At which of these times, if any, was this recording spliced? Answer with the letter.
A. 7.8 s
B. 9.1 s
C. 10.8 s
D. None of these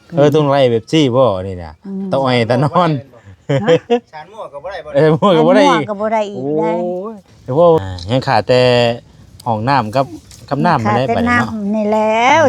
A